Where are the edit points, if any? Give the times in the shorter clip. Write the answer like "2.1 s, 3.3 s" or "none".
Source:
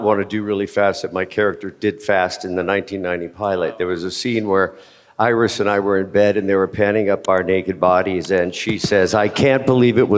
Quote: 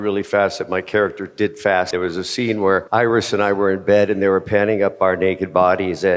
1.9 s, 2.8 s